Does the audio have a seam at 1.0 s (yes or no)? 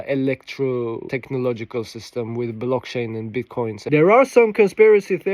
yes